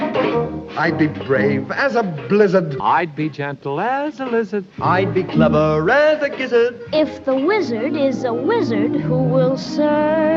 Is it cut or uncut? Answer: uncut